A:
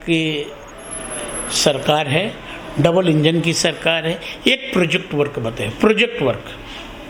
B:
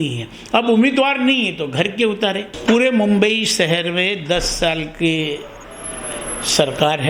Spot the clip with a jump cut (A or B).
B